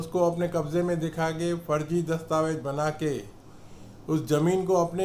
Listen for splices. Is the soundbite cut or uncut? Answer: uncut